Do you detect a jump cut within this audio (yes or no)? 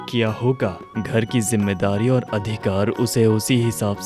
no